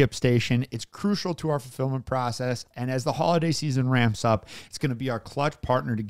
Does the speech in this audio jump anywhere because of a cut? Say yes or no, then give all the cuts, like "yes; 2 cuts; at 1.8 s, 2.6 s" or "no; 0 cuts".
no; 0 cuts